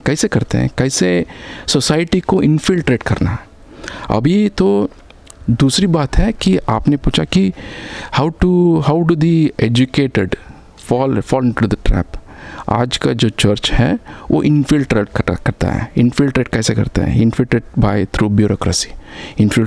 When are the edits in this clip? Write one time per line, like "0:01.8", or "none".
none